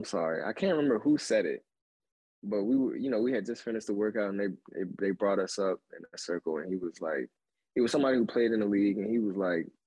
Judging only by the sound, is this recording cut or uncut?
uncut